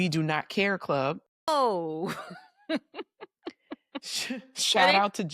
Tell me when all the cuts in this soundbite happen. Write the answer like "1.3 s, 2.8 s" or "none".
1.4 s